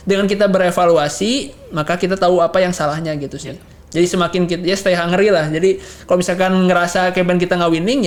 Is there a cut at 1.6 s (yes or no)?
no